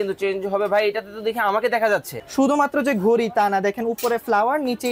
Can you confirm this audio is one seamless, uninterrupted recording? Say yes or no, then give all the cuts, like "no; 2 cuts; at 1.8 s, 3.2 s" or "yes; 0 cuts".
no; 1 cut; at 2.1 s